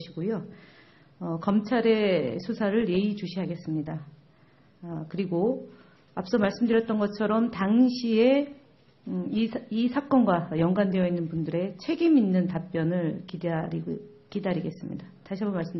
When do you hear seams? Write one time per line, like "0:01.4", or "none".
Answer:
none